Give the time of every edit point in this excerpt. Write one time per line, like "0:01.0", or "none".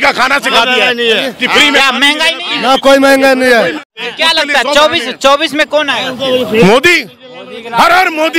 0:04.0